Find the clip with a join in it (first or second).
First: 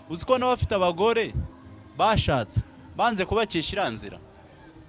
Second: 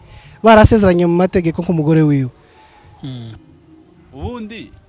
second